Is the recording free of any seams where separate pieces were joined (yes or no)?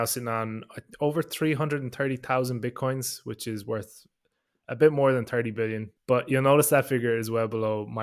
no